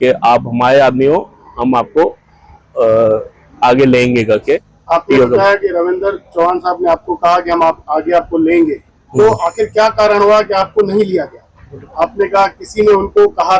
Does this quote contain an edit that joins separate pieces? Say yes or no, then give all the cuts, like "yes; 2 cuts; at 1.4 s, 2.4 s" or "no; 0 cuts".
yes; 2 cuts; at 4.7 s, 11.8 s